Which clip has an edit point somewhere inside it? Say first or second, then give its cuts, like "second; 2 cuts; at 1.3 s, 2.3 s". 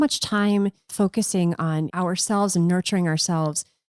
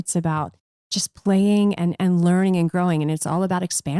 first; 2 cuts; at 0.9 s, 1.9 s